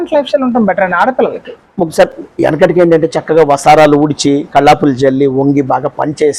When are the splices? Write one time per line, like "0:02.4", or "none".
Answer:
none